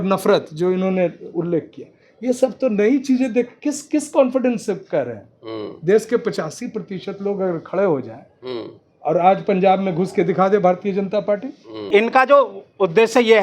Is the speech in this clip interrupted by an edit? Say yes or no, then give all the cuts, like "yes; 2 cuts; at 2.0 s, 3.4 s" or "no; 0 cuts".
yes; 1 cut; at 11.9 s